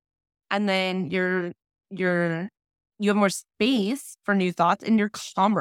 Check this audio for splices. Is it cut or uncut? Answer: uncut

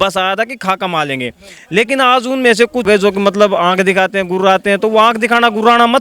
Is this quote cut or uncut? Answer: cut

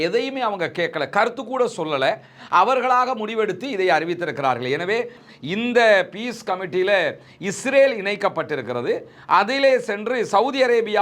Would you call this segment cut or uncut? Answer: cut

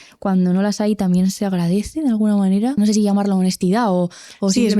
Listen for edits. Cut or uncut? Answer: cut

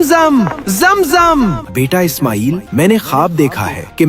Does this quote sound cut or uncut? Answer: cut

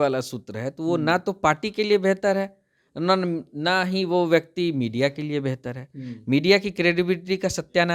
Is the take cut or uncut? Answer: uncut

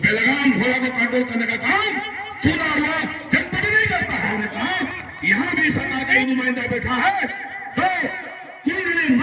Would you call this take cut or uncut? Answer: cut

